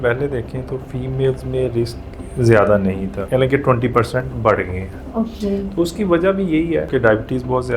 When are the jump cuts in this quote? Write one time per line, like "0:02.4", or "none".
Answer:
0:03.1
0:06.9